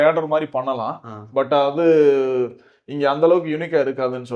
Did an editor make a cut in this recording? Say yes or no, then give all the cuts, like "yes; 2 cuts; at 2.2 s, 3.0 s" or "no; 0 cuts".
no; 0 cuts